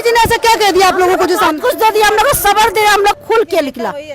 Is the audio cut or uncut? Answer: cut